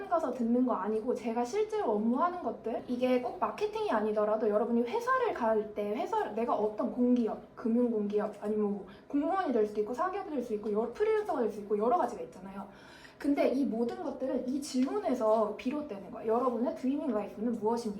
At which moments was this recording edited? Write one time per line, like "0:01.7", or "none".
0:02.8